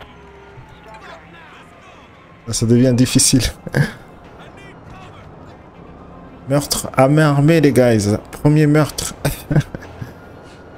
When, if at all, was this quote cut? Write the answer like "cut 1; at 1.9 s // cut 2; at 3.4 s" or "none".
none